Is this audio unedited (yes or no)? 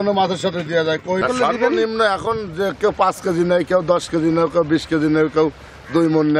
no